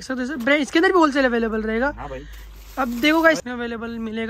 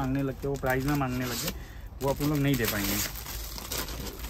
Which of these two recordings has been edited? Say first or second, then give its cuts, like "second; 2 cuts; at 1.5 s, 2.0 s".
first; 1 cut; at 3.4 s